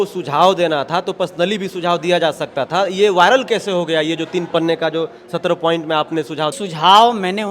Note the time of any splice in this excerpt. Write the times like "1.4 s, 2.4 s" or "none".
6.6 s